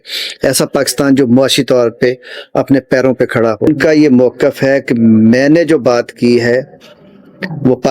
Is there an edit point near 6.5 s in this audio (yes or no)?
no